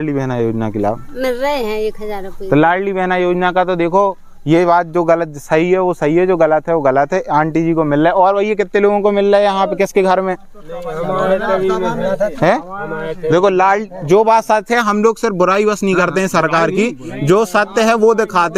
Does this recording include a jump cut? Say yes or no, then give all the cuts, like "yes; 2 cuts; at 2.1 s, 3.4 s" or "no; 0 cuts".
no; 0 cuts